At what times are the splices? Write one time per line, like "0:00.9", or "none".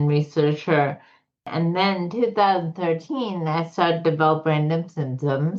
0:01.5